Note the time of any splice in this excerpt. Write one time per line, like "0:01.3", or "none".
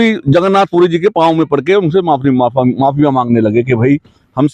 none